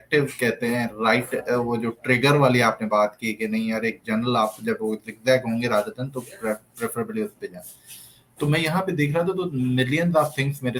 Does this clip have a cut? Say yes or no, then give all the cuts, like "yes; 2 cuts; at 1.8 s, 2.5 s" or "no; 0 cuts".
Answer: no; 0 cuts